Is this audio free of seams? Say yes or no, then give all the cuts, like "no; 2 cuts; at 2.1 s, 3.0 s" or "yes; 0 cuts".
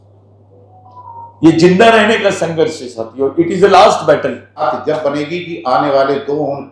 no; 1 cut; at 4.6 s